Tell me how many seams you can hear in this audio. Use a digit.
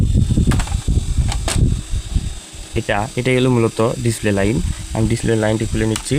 1